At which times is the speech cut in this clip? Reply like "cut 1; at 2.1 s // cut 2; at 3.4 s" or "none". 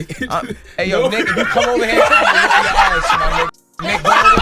none

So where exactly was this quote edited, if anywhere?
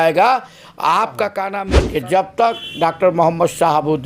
cut 1; at 1.4 s

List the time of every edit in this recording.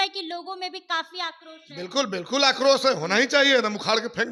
none

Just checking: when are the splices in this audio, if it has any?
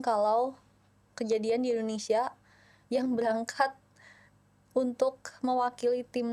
none

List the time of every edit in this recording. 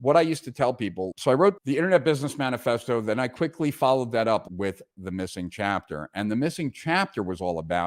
cut 1; at 1.1 s

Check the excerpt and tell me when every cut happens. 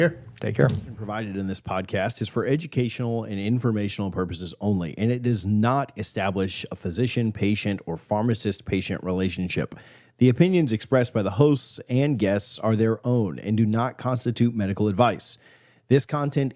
cut 1; at 1.0 s

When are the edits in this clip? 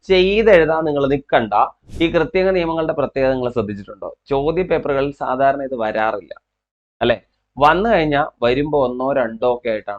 cut 1; at 1.8 s

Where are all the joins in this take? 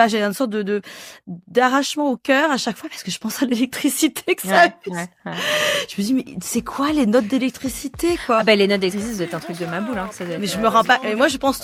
none

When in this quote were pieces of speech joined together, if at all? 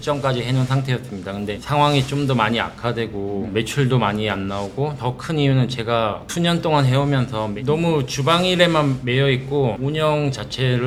none

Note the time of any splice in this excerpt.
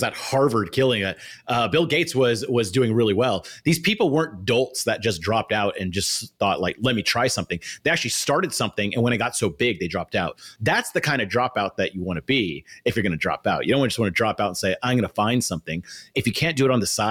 cut 1; at 10.4 s // cut 2; at 16.1 s

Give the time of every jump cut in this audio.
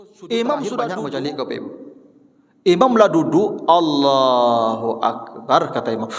cut 1; at 0.9 s

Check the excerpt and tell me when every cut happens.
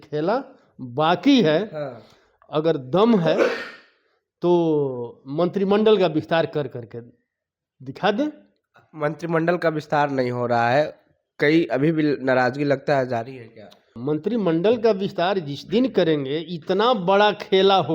cut 1; at 13.9 s

